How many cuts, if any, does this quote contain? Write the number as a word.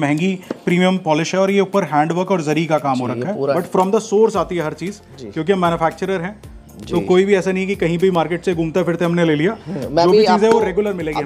one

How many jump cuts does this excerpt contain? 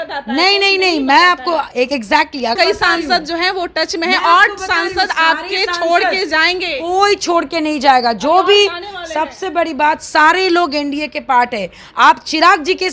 one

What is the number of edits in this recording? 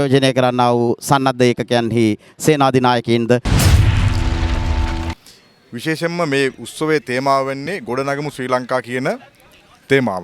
two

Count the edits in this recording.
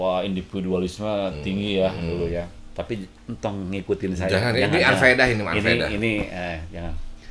zero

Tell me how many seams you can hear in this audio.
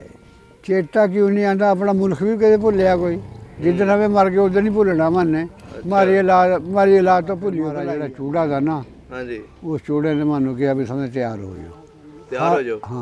one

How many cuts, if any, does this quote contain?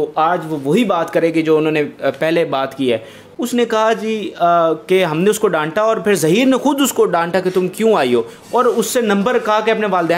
one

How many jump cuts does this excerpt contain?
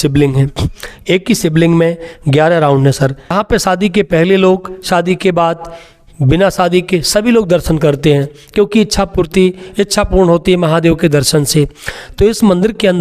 one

